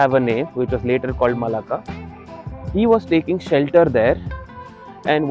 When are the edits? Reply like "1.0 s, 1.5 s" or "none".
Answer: none